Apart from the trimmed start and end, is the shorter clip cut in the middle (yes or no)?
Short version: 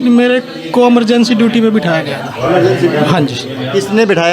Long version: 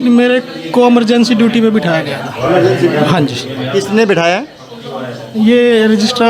no